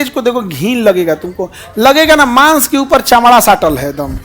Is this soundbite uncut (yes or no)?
yes